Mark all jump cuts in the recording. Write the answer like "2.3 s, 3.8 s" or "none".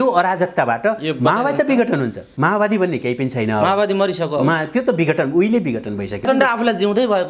2.2 s, 6.2 s